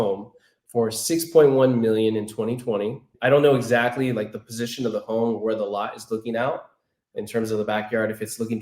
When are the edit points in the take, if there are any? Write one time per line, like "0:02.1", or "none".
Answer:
0:03.1